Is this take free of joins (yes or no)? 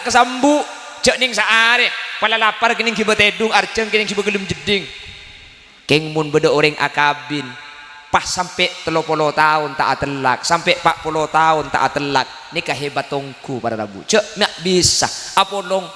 yes